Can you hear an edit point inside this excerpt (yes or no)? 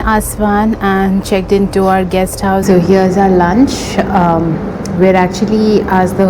yes